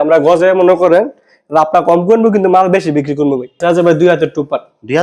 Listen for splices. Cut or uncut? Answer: cut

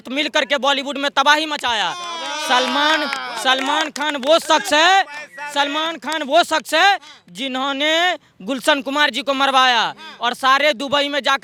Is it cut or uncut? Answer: uncut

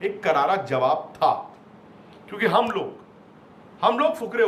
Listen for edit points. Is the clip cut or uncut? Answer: uncut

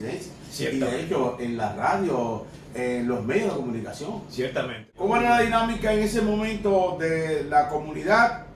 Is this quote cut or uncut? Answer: cut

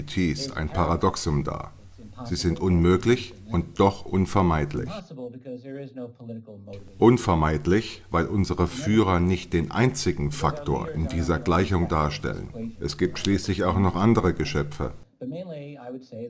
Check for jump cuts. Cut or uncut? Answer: cut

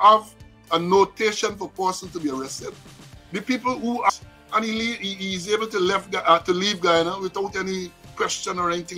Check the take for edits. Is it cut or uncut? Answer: cut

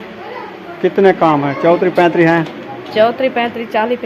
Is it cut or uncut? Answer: uncut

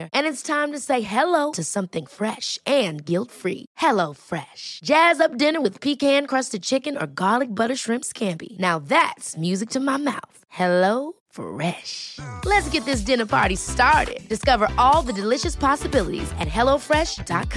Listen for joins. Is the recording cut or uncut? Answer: uncut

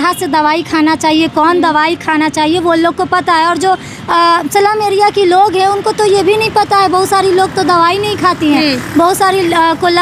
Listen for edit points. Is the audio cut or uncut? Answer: uncut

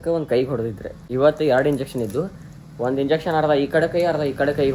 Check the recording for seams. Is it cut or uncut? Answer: uncut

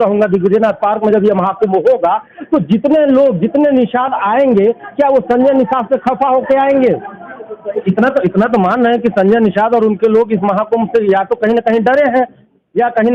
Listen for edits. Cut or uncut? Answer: cut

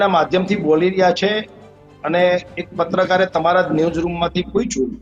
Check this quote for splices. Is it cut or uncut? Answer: uncut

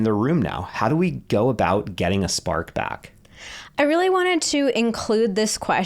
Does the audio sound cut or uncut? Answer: uncut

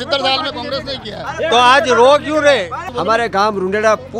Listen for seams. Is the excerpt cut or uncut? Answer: cut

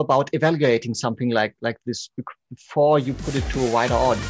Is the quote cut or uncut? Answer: uncut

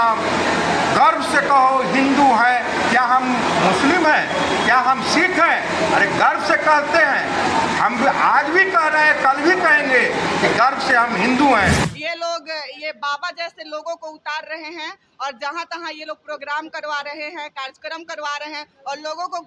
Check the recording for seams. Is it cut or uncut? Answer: cut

